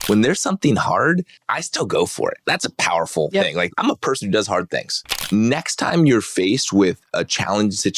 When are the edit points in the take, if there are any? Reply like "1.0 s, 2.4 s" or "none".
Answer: 1.4 s, 2.4 s, 3.7 s, 5.2 s